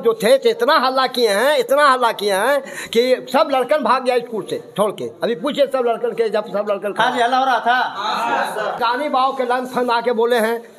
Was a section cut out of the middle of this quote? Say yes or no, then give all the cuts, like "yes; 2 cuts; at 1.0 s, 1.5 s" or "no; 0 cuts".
yes; 1 cut; at 8.8 s